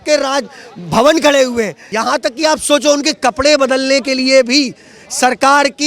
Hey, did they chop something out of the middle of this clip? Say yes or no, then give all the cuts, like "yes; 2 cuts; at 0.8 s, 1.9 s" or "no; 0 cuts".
yes; 1 cut; at 1.9 s